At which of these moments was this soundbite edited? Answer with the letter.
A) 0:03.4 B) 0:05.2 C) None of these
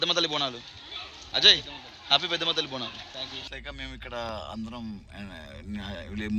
A